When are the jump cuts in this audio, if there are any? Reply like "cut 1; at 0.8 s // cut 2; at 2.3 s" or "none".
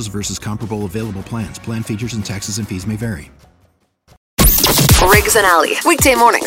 cut 1; at 4.3 s